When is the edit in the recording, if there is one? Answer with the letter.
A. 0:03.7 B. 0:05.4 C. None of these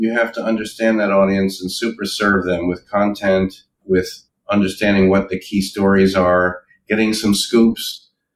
A